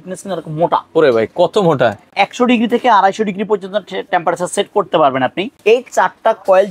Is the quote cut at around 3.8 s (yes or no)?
no